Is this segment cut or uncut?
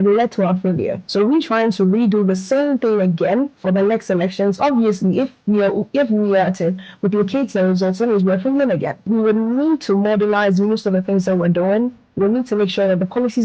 cut